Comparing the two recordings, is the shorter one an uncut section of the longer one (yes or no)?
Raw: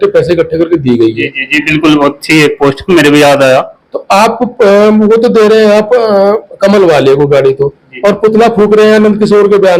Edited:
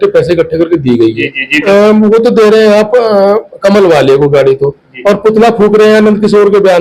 no